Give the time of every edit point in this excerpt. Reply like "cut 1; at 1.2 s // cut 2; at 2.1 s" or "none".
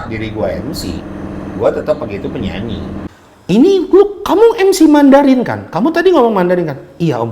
cut 1; at 3.1 s

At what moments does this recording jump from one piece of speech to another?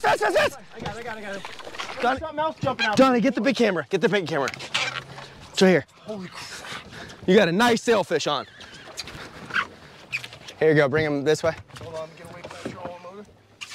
cut 1; at 2.0 s // cut 2; at 8.9 s

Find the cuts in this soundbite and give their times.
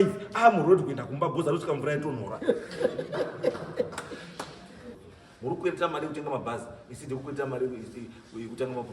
cut 1; at 5.0 s

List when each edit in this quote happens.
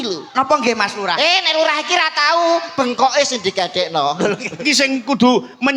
cut 1; at 4.6 s

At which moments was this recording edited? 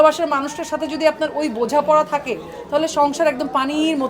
none

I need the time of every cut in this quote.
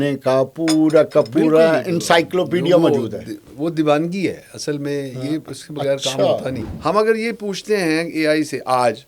cut 1; at 6.5 s

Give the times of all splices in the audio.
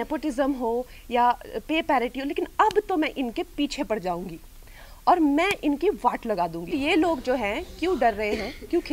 cut 1; at 6.7 s

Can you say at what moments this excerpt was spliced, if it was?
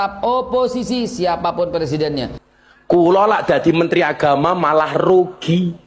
cut 1; at 2.4 s

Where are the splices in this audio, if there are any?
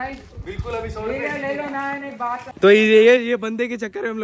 cut 1; at 2.5 s

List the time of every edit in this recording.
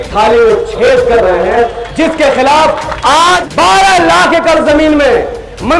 cut 1; at 3.4 s

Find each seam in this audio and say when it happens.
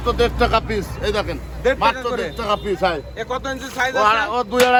none

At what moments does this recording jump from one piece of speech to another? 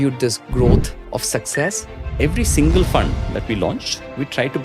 cut 1; at 1.0 s // cut 2; at 2.0 s

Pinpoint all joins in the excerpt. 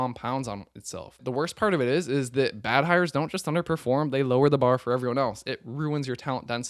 cut 1; at 1.2 s

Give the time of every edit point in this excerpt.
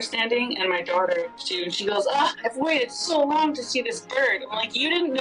cut 1; at 1.5 s

